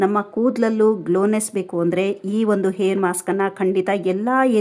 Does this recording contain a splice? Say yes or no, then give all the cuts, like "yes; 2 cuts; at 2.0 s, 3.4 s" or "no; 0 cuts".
no; 0 cuts